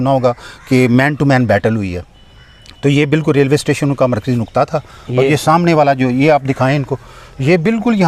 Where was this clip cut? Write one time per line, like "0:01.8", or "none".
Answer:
none